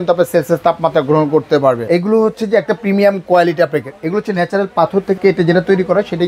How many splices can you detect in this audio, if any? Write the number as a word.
two